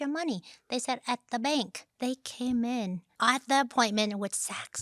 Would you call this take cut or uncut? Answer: cut